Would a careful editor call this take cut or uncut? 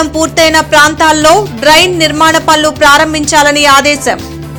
uncut